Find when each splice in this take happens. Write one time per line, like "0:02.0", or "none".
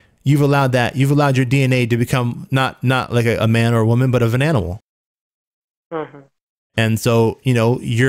none